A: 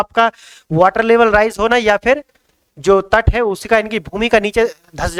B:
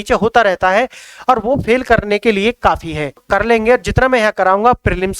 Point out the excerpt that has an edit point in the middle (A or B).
B